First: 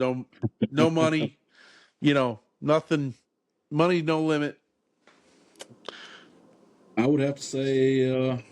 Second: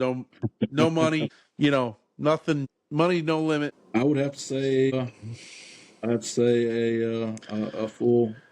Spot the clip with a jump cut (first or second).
second